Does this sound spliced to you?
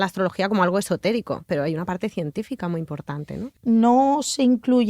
yes; 1 cut; at 3.5 s

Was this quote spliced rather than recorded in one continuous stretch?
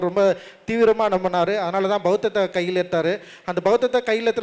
no; 0 cuts

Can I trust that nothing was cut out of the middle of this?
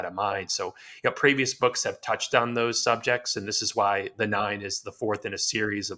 yes; 0 cuts

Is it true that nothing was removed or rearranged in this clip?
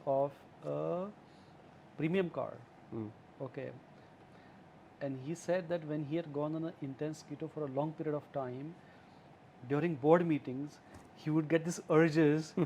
no; 1 cut; at 4.3 s

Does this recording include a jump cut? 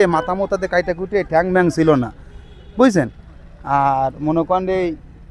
no; 0 cuts

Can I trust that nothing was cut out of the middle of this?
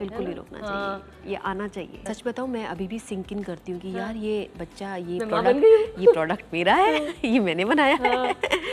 yes; 0 cuts

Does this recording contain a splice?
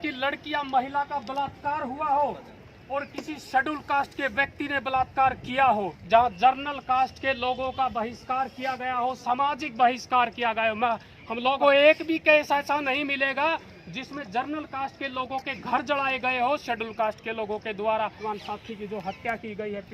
yes; 3 cuts; at 6.0 s, 11.6 s, 18.2 s

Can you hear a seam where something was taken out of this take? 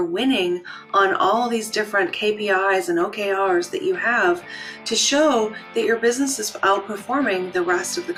no; 0 cuts

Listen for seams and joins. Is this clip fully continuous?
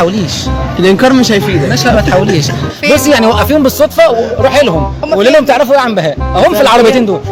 yes; 0 cuts

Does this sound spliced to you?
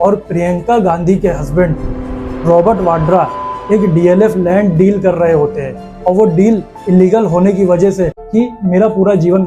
yes; 1 cut; at 8.2 s

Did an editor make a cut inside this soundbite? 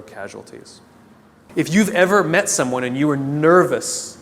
yes; 1 cut; at 1.4 s

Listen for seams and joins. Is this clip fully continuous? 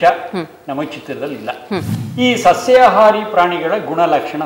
no; 1 cut; at 2.0 s

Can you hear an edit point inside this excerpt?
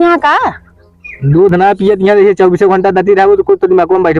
no; 0 cuts

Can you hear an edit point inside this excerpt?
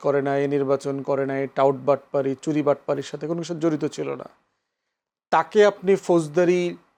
no; 0 cuts

